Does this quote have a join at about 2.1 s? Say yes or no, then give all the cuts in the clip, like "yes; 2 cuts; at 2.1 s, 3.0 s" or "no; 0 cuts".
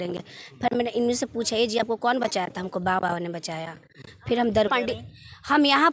no; 1 cut; at 4.7 s